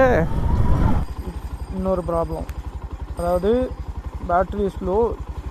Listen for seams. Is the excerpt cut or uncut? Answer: cut